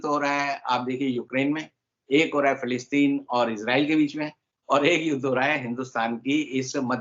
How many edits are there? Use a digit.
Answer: 0